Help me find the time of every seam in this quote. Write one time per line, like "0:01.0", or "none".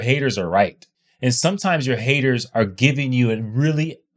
0:00.9